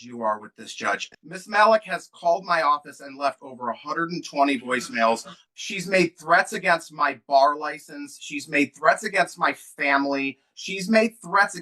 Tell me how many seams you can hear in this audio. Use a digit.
2